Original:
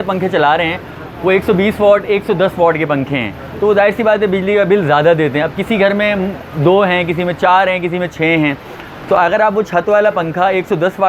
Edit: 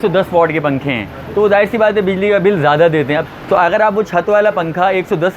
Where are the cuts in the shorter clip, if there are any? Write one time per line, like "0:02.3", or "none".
0:03.3